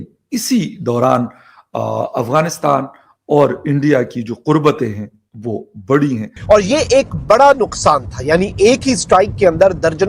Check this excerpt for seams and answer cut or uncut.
cut